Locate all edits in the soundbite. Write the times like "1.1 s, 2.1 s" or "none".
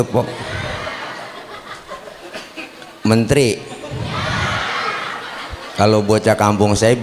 none